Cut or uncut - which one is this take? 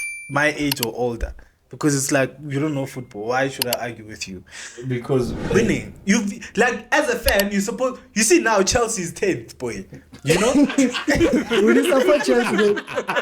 cut